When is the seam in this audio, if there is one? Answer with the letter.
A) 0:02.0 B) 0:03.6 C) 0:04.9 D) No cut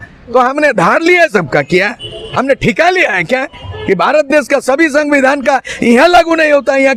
D